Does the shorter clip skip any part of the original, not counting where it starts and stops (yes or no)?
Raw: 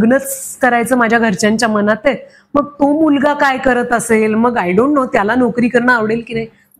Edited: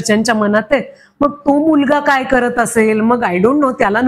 no